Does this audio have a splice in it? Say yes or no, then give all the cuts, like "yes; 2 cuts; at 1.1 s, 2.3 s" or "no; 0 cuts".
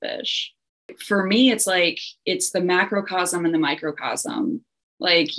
yes; 1 cut; at 1.0 s